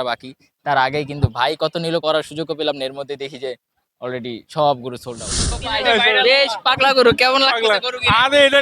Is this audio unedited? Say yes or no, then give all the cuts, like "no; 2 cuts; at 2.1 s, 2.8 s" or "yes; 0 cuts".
no; 1 cut; at 5.6 s